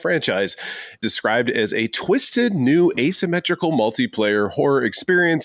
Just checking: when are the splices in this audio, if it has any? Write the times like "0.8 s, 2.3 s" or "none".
1.0 s